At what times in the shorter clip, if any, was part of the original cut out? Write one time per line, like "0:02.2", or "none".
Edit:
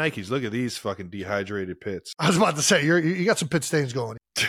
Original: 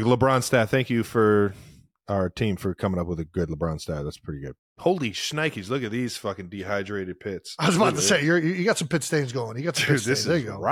none